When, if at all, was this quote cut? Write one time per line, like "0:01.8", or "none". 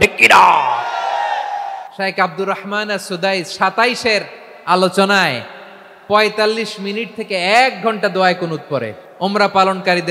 0:01.8
0:09.0